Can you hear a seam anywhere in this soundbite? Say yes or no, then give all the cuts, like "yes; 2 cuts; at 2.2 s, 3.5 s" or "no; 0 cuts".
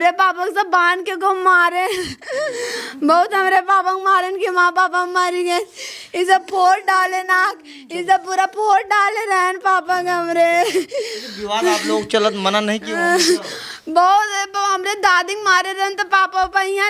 no; 0 cuts